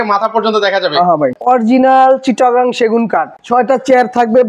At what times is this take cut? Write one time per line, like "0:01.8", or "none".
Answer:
0:01.4
0:03.4